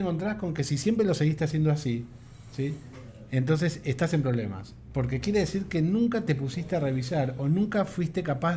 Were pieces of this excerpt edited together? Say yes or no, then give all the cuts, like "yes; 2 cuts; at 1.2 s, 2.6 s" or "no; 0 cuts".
no; 0 cuts